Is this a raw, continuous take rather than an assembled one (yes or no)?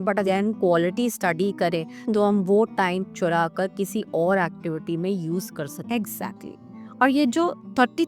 yes